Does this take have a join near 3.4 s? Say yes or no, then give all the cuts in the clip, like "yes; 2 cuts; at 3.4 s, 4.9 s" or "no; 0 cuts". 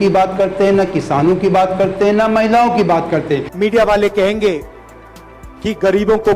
yes; 1 cut; at 3.4 s